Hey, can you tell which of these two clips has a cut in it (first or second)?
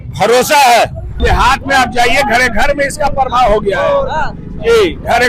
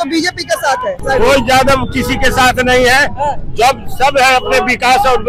first